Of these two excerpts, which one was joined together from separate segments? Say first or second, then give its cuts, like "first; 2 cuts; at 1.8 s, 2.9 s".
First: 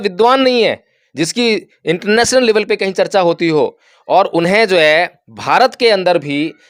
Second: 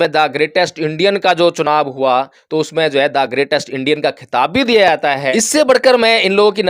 second; 1 cut; at 5.3 s